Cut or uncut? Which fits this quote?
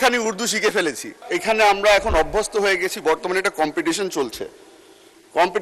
cut